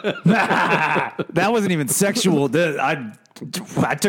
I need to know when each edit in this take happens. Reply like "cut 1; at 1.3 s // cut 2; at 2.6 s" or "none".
cut 1; at 1.3 s